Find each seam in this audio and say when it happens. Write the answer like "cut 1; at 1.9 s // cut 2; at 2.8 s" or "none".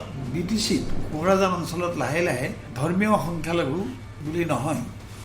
cut 1; at 2.6 s // cut 2; at 4.1 s